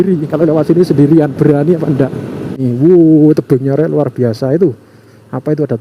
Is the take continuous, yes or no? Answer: no